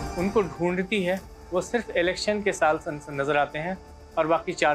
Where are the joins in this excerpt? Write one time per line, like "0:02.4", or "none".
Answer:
none